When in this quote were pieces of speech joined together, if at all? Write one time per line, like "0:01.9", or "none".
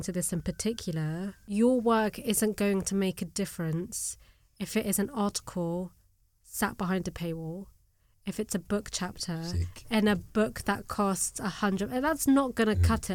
0:01.4